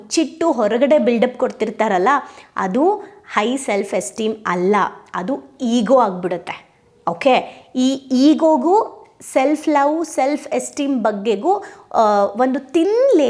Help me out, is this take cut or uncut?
uncut